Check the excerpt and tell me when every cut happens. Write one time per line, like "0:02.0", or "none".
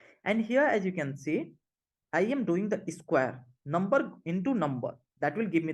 none